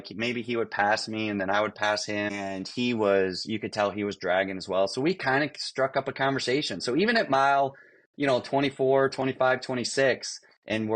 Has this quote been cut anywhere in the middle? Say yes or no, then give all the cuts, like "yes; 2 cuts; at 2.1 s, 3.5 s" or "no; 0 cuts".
yes; 1 cut; at 2.3 s